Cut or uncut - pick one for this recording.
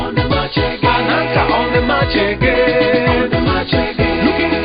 uncut